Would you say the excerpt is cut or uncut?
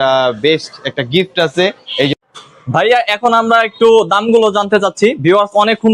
cut